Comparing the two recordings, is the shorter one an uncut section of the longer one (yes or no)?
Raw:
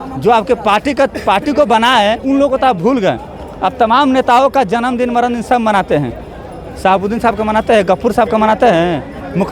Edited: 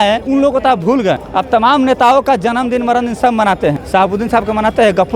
no